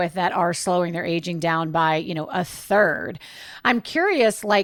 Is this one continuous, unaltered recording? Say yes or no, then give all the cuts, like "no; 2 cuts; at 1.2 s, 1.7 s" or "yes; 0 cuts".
yes; 0 cuts